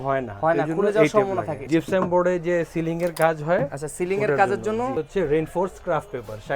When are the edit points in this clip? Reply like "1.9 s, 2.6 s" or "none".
1.6 s, 4.9 s